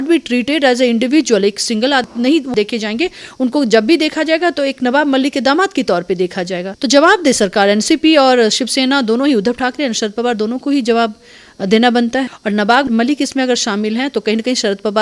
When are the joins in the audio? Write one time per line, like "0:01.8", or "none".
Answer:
0:02.3
0:06.7
0:12.8